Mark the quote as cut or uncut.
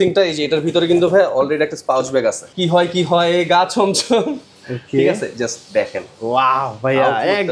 cut